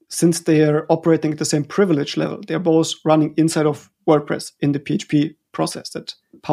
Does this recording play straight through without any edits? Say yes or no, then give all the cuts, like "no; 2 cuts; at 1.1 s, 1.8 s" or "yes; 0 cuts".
yes; 0 cuts